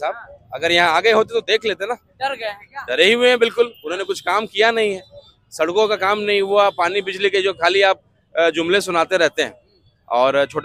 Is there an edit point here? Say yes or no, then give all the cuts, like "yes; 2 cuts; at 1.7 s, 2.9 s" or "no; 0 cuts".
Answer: no; 0 cuts